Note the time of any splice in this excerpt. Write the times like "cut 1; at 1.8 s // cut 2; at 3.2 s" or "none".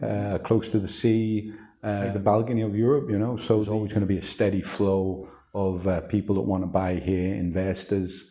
cut 1; at 2.1 s // cut 2; at 3.7 s